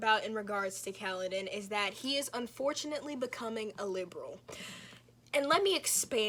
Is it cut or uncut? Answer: uncut